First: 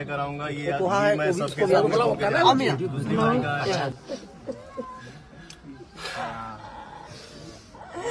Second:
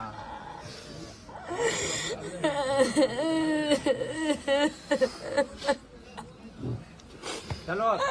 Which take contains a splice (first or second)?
first